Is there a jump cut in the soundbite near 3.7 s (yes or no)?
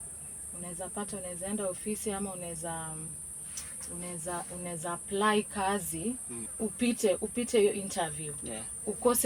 no